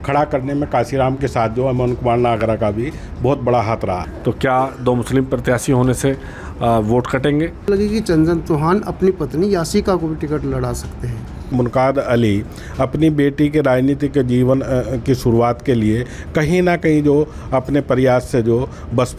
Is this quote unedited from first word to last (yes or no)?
no